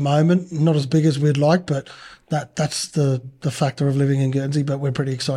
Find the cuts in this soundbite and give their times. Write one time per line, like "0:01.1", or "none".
none

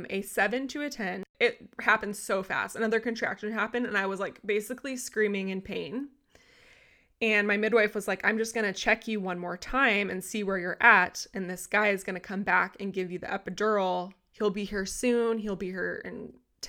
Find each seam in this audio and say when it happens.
0:01.3

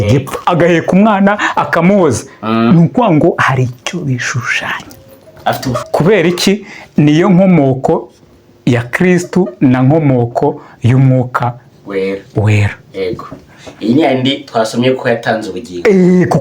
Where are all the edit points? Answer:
0:05.7

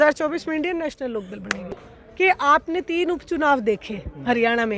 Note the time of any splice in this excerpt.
0:01.9

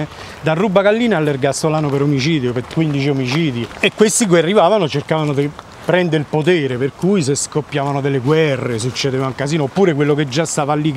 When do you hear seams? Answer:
none

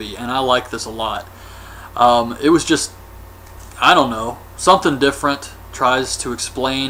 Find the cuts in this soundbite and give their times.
none

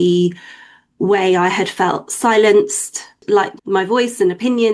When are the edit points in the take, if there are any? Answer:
0:03.2

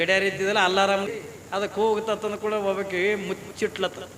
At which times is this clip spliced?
0:01.1

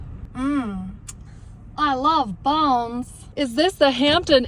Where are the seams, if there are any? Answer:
0:03.2

